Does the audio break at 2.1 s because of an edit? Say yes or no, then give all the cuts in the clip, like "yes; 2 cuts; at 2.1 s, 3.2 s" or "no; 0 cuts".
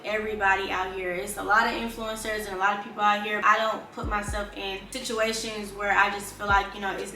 no; 2 cuts; at 3.4 s, 4.9 s